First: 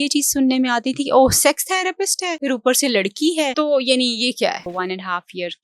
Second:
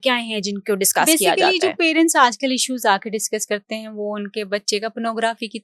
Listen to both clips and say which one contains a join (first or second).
first